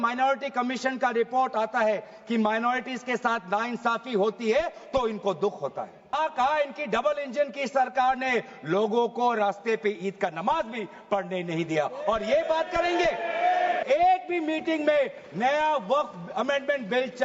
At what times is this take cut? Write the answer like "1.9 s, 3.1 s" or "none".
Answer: 6.1 s, 13.8 s